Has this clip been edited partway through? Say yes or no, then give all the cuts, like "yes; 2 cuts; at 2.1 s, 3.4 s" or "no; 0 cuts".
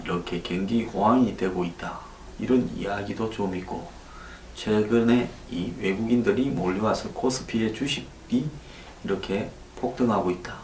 no; 0 cuts